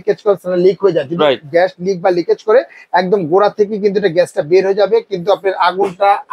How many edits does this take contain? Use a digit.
0